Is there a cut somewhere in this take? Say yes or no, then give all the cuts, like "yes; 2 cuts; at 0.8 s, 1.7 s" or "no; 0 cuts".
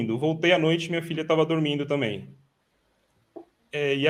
no; 0 cuts